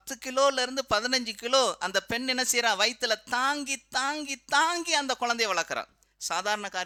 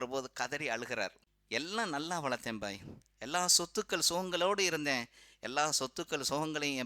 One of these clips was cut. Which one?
second; 1 cut; at 1.3 s

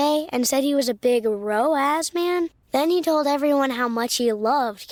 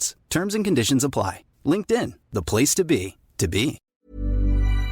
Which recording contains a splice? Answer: second; 1 cut; at 3.8 s

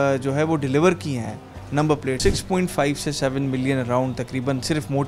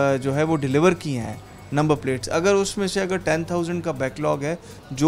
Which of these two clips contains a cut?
first; 1 cut; at 2.2 s

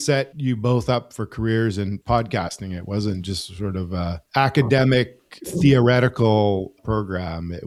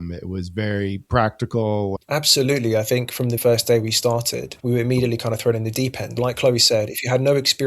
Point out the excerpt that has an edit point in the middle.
second; 1 cut; at 2.0 s

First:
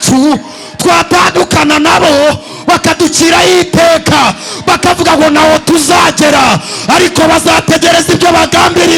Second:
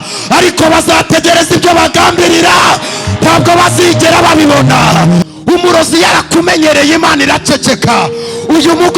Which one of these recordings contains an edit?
second; 1 cut; at 5.2 s

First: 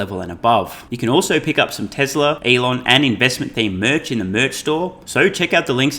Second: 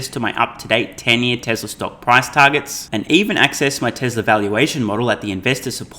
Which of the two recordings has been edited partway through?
first; 3 cuts; at 0.8 s, 2.4 s, 5.0 s

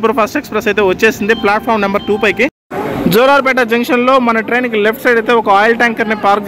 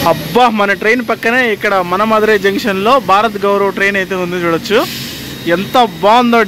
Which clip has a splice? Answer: first; 1 cut; at 2.6 s

